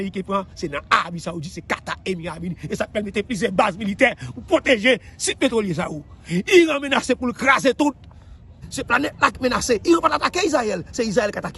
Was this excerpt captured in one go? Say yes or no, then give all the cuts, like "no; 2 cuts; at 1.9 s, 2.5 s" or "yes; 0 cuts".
no; 1 cut; at 8.6 s